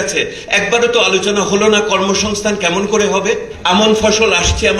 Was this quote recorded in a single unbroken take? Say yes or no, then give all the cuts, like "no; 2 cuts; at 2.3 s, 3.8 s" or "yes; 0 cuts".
no; 1 cut; at 3.5 s